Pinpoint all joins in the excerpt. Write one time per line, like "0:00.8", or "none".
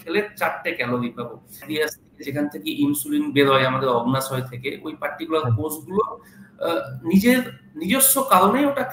0:01.7